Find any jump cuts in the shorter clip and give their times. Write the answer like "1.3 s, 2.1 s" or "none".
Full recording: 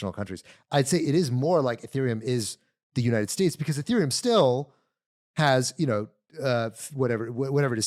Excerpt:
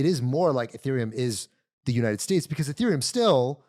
none